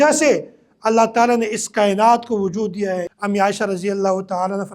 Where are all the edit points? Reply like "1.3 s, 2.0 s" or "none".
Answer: 3.1 s